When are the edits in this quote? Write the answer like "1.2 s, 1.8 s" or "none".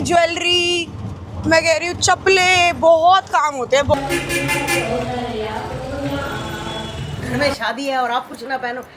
3.9 s, 7.1 s